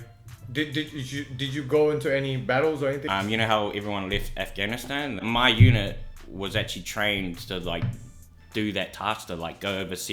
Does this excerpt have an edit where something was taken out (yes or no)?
yes